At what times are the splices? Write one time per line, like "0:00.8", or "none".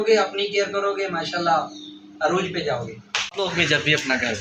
0:03.3